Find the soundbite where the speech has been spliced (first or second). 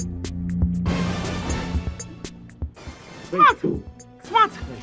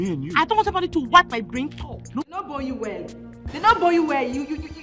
second